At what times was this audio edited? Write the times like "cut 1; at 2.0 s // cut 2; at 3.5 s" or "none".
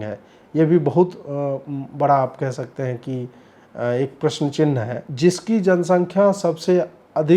cut 1; at 5.0 s

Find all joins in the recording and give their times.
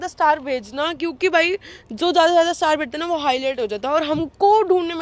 none

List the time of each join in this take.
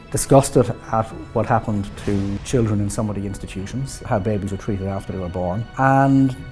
cut 1; at 2.4 s // cut 2; at 4.0 s // cut 3; at 5.7 s

